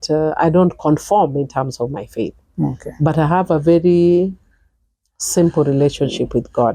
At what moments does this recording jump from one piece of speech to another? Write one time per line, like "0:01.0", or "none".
none